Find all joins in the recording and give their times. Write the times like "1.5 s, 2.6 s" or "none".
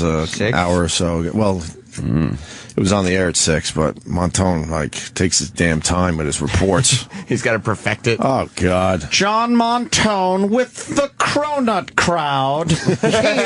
5.7 s